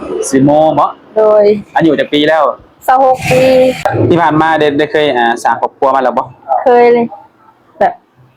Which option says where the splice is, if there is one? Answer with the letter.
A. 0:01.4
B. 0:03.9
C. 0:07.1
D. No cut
B